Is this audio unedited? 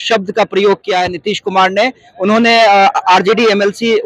yes; 0 cuts

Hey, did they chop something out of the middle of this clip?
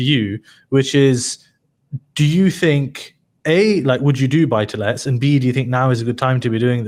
no; 0 cuts

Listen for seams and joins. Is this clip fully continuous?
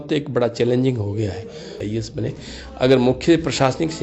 no; 1 cut; at 1.8 s

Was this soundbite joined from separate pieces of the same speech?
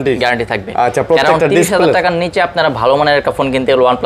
no; 0 cuts

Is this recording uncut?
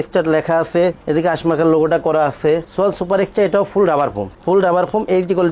yes; 0 cuts

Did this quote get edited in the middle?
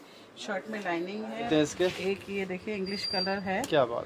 yes; 1 cut; at 1.5 s

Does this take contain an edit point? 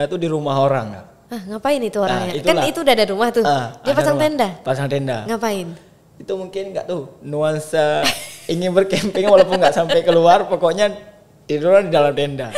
no; 0 cuts

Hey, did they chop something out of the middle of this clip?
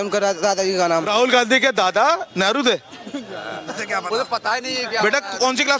yes; 1 cut; at 1.1 s

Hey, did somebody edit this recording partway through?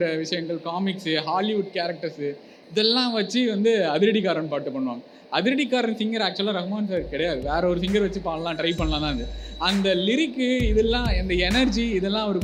no; 0 cuts

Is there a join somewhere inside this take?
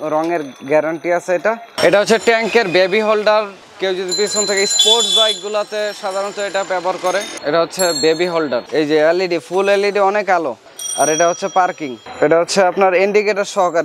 yes; 4 cuts; at 1.7 s, 3.6 s, 7.3 s, 8.7 s

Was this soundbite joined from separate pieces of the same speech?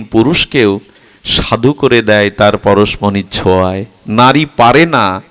no; 0 cuts

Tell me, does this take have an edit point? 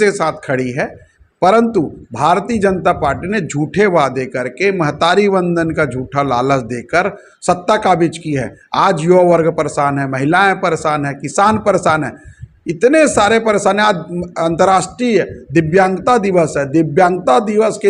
no; 0 cuts

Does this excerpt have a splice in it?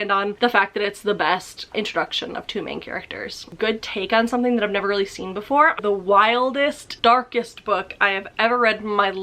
yes; 2 cuts; at 3.5 s, 5.7 s

